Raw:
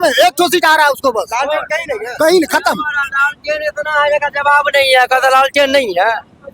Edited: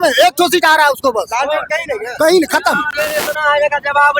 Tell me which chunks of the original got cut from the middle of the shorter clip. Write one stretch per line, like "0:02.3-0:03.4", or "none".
0:02.9-0:03.4